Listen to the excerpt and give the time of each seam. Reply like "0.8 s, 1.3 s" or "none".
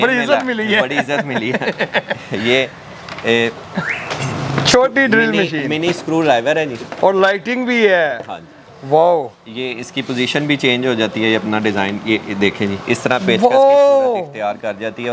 none